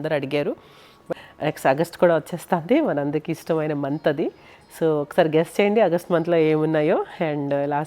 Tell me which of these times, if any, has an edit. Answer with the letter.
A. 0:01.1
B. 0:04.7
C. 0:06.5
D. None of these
A